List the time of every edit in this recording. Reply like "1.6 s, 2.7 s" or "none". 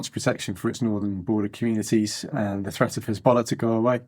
2.3 s